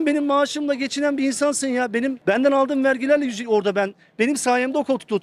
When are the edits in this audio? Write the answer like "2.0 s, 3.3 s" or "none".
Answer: 2.2 s